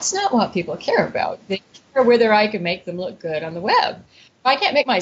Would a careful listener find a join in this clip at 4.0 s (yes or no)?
yes